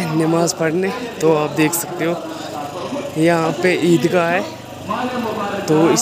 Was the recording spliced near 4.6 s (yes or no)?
no